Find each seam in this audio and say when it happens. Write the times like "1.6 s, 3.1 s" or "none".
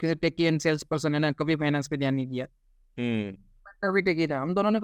none

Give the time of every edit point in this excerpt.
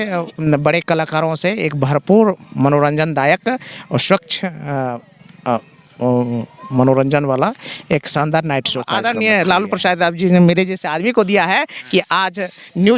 8.9 s

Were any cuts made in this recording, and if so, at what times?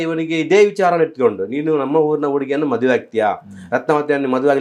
none

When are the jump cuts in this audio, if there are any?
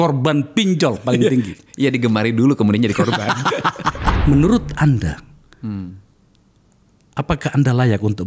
4.2 s

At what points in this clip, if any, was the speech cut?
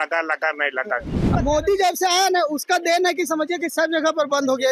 1.2 s

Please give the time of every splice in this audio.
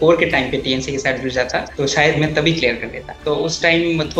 1.7 s, 3.1 s

